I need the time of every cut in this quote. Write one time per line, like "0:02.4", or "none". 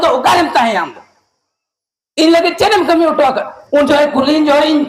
0:03.5

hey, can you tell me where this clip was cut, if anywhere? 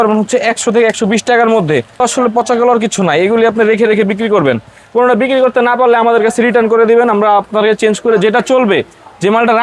0:02.0

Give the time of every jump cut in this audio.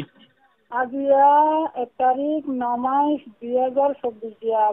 none

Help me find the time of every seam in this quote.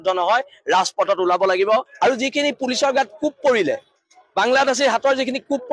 0:01.9

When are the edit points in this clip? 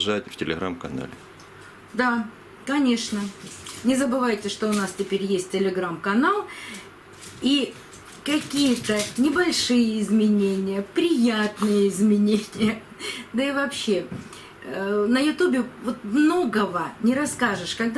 none

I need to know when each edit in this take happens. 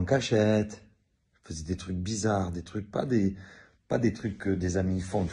0:02.3

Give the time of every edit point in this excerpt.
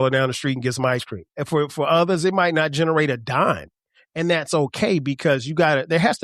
0:01.4

